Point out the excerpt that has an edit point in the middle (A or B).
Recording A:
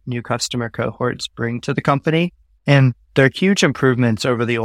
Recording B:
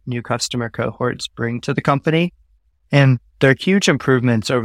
A